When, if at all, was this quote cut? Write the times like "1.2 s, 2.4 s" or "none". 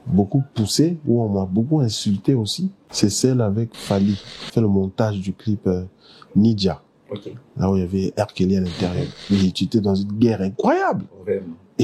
2.8 s, 4.3 s, 9.1 s